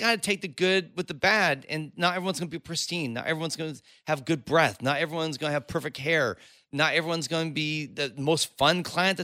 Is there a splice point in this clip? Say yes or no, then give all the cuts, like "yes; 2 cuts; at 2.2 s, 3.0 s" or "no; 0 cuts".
no; 0 cuts